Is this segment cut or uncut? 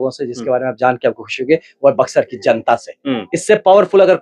uncut